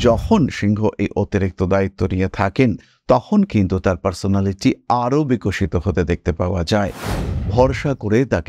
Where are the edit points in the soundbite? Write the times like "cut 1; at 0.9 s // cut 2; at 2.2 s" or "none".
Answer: cut 1; at 7.2 s

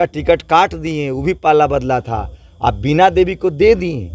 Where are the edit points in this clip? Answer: none

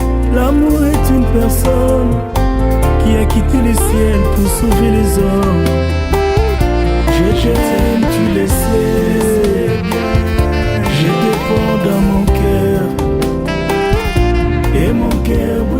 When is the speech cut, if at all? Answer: cut 1; at 1.2 s

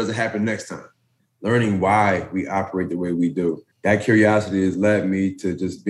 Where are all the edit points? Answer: cut 1; at 1.2 s // cut 2; at 3.7 s

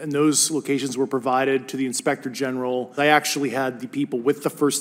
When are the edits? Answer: cut 1; at 2.9 s

